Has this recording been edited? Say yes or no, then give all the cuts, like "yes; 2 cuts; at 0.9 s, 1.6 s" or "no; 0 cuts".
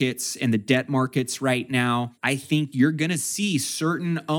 yes; 1 cut; at 2.2 s